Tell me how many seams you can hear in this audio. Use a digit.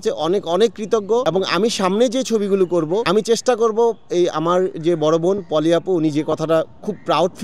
2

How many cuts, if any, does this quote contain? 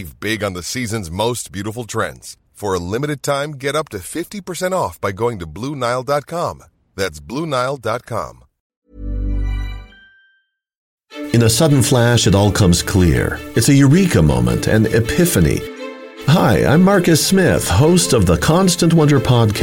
2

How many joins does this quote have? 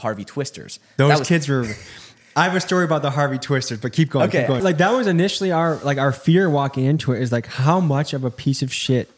1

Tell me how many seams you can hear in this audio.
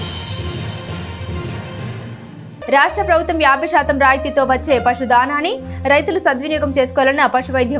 1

